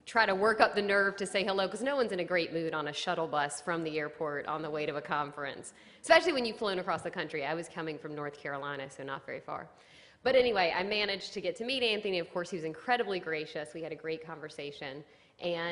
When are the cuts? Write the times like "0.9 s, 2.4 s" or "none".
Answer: none